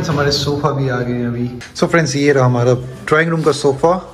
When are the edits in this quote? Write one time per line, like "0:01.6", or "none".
0:01.6

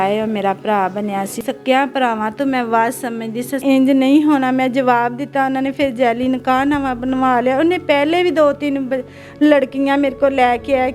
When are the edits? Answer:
0:01.4
0:03.6

